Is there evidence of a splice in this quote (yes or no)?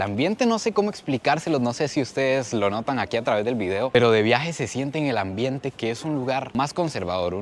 no